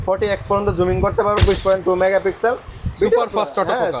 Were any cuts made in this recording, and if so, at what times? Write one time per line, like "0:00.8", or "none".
0:01.4